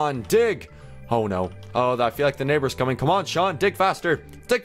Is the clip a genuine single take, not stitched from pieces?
yes; 0 cuts

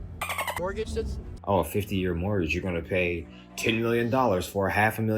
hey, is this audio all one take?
no; 1 cut; at 1.3 s

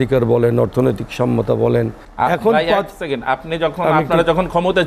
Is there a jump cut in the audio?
yes; 1 cut; at 2.0 s

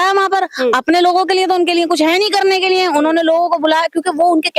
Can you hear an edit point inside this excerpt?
no; 0 cuts

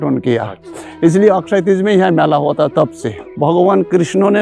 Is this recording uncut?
no; 1 cut; at 3.3 s

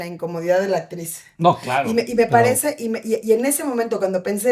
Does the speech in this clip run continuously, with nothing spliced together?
yes; 0 cuts

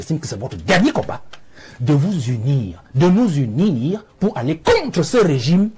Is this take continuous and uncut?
yes; 0 cuts

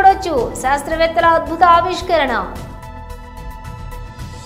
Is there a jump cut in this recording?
no; 0 cuts

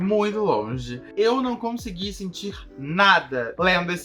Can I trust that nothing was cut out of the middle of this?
no; 1 cut; at 1.0 s

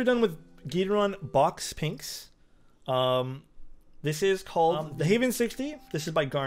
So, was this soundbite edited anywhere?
yes; 1 cut; at 4.9 s

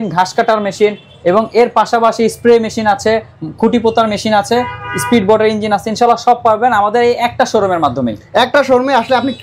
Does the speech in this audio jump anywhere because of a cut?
no; 0 cuts

